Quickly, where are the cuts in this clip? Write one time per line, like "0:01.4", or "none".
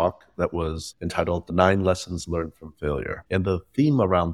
none